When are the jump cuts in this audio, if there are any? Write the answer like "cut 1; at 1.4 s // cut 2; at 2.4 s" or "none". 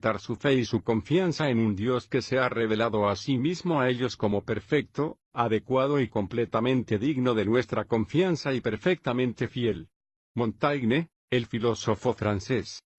cut 1; at 4.0 s